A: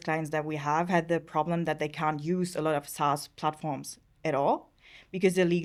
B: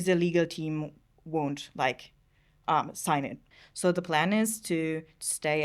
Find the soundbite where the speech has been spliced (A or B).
B